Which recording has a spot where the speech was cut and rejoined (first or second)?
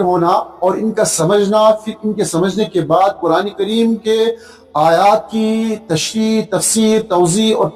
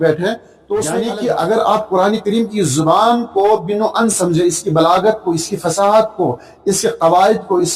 second